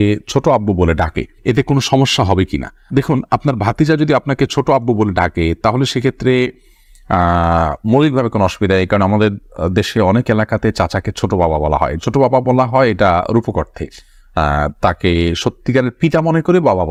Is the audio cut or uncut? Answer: uncut